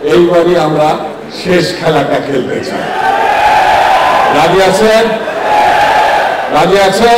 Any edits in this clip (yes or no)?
no